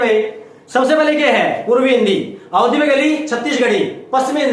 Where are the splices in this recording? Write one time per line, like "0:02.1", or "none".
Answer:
none